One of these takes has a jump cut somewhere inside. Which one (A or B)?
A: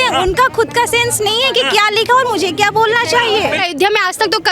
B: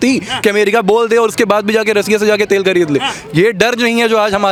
A